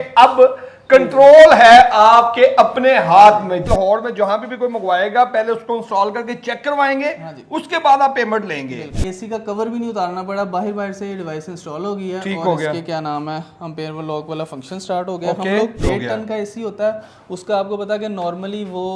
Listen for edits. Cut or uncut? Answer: cut